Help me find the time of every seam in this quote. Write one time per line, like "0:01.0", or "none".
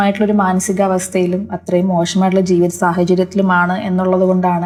none